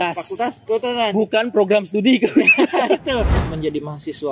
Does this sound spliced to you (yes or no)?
yes